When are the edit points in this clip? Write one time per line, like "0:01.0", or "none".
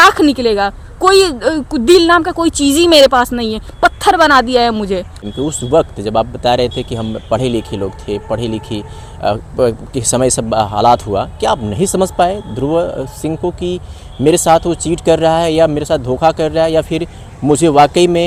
none